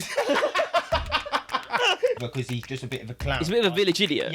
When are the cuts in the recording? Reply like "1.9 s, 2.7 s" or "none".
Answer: 2.2 s